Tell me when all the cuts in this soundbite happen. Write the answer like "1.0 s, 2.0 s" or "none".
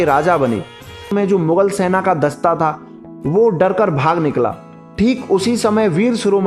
1.1 s

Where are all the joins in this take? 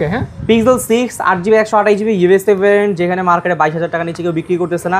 none

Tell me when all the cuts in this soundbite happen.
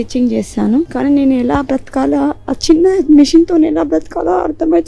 0.9 s

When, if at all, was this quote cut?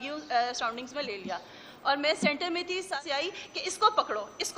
3.0 s

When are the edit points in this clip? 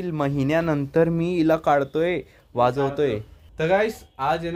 3.4 s

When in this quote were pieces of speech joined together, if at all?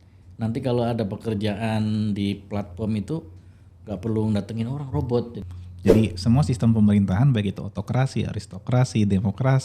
5.3 s

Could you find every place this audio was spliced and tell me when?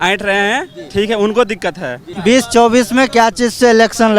2.0 s

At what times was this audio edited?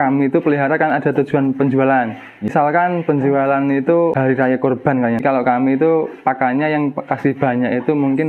2.5 s, 4.1 s, 5.2 s

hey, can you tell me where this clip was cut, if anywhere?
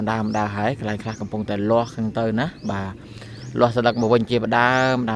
none

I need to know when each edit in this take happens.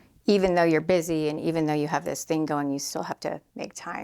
none

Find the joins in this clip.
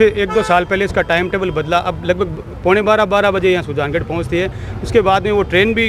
none

